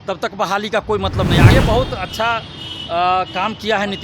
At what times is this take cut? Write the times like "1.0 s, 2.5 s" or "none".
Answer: 1.5 s